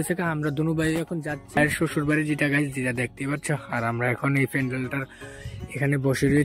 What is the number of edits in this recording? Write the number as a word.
one